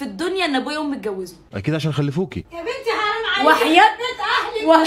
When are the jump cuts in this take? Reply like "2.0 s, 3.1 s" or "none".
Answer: none